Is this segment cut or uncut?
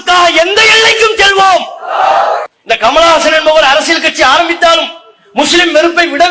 cut